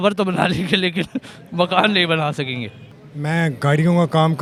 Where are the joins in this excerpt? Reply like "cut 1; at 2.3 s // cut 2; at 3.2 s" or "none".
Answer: none